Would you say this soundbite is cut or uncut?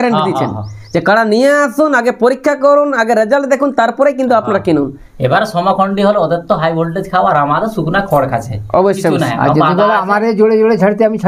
uncut